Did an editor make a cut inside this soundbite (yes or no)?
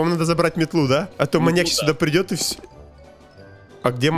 yes